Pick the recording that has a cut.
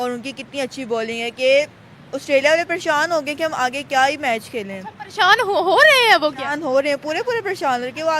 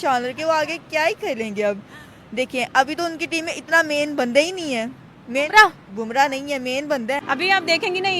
second; 1 cut; at 7.2 s

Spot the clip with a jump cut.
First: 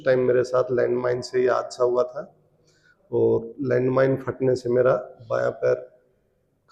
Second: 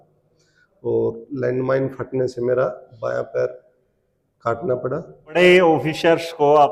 second; 1 cut; at 5.4 s

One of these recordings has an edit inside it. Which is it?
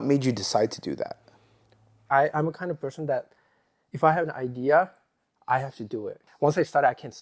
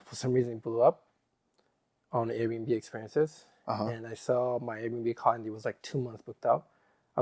first; 2 cuts; at 2.1 s, 6.2 s

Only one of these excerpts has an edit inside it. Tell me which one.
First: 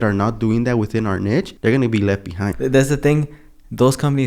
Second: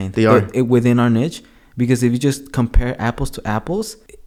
first; 2 cuts; at 1.5 s, 2.5 s

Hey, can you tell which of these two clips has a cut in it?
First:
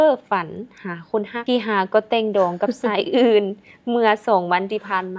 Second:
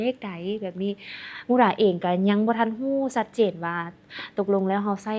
first; 1 cut; at 1.3 s

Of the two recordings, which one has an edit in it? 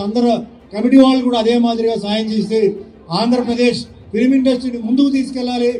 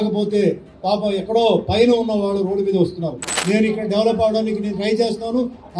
second; 1 cut; at 3.3 s

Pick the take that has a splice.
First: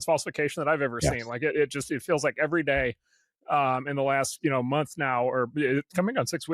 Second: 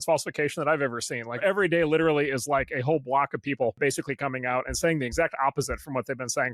second; 2 cuts; at 1.4 s, 3.8 s

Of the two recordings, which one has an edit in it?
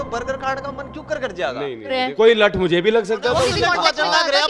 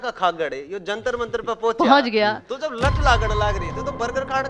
first; 2 cuts; at 2.0 s, 3.5 s

